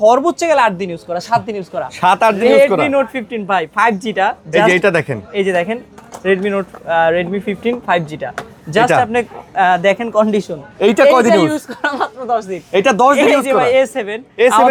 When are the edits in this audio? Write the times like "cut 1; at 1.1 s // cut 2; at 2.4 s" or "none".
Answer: none